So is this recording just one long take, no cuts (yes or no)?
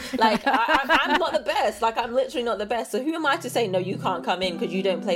yes